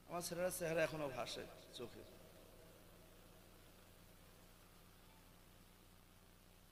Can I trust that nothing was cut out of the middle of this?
yes; 0 cuts

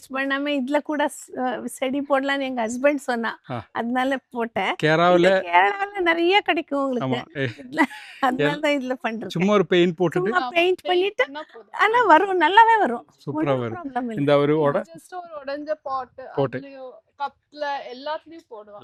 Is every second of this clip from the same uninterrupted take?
yes; 0 cuts

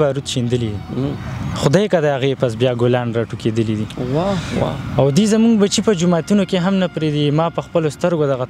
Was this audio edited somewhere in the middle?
no; 0 cuts

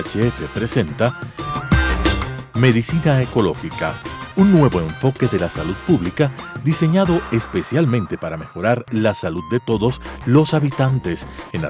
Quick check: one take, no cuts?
yes; 0 cuts

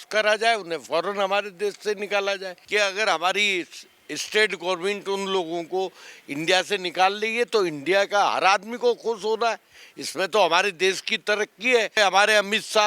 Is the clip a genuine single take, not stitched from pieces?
no; 2 cuts; at 2.5 s, 12.0 s

